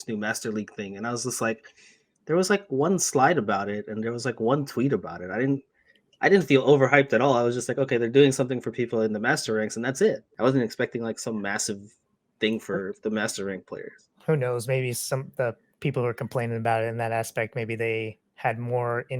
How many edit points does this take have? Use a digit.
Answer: 1